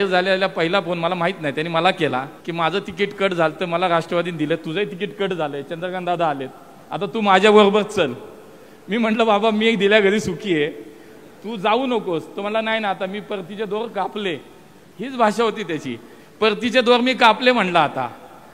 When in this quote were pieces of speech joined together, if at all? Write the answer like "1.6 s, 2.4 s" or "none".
2.4 s